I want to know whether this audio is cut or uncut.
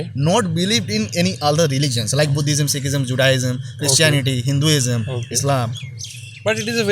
uncut